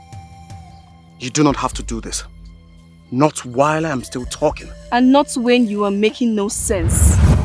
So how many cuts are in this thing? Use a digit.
1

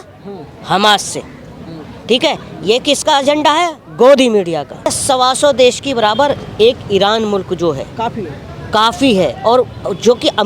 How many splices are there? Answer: 1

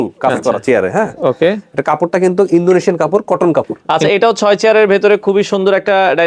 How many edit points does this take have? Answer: 1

